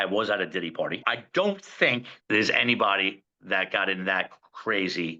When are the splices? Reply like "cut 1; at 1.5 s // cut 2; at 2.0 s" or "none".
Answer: cut 1; at 1.1 s // cut 2; at 2.1 s